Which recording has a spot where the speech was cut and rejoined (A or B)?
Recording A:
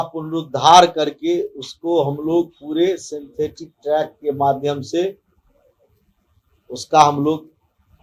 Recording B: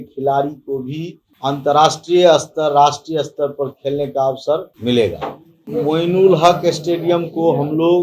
B